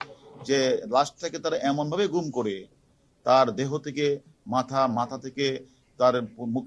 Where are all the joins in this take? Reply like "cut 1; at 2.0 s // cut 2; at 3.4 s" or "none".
none